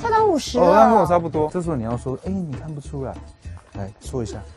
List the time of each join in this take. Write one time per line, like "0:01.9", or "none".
0:01.5